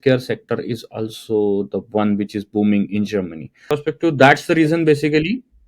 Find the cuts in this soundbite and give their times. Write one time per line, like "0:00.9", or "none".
0:03.7